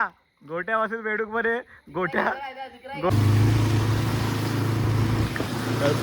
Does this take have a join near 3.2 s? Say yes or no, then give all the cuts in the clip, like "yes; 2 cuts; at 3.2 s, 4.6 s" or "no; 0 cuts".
yes; 1 cut; at 3.2 s